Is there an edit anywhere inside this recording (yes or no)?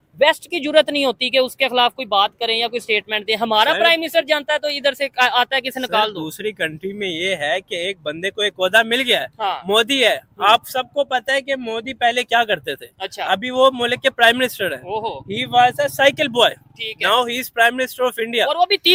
no